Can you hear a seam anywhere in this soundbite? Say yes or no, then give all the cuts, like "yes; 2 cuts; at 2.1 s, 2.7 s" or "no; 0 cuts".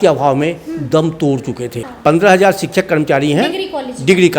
yes; 1 cut; at 1.8 s